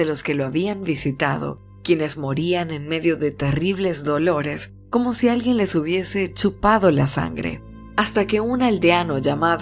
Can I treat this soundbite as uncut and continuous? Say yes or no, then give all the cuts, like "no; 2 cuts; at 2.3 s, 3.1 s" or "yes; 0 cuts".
no; 1 cut; at 6.3 s